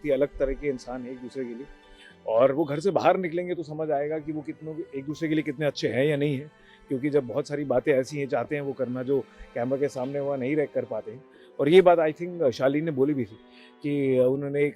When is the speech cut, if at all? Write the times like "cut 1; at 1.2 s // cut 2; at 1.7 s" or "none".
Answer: none